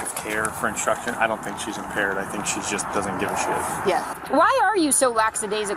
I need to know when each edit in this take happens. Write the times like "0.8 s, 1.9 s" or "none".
4.1 s